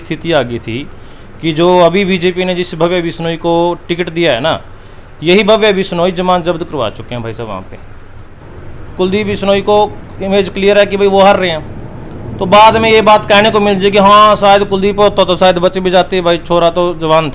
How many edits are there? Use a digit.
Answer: 1